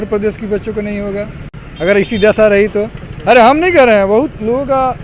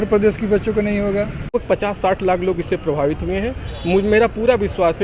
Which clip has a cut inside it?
second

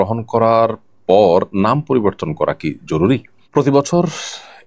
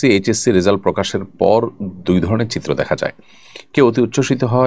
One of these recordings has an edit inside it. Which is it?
first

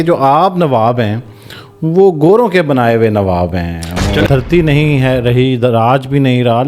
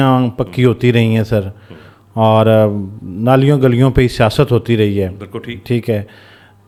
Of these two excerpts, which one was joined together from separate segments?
first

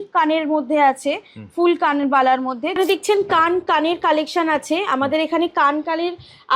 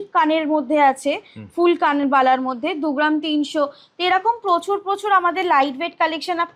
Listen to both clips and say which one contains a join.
first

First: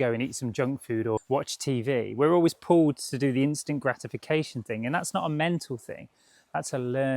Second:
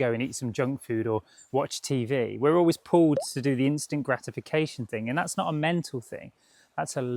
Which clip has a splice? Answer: first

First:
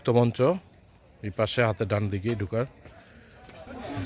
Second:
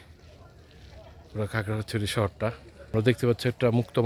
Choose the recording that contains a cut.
second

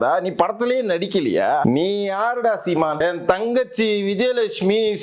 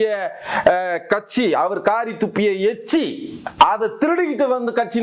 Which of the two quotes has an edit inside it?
first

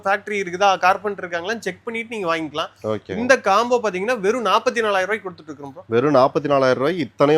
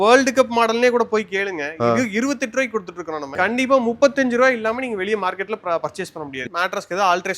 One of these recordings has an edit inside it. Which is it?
second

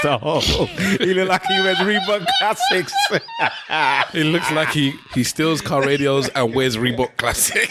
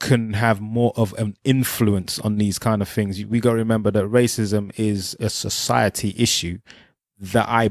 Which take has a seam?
second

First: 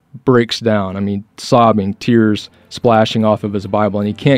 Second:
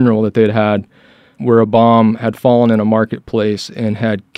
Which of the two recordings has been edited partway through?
second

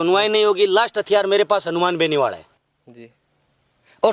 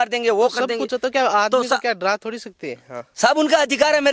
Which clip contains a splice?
first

